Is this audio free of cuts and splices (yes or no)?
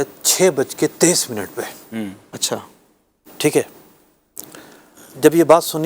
yes